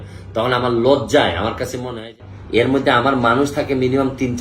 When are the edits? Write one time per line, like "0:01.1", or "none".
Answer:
0:02.1